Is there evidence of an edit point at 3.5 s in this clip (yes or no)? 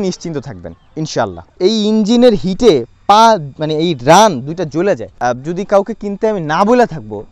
no